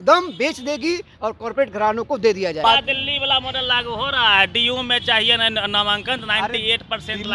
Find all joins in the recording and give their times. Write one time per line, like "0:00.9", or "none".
0:02.6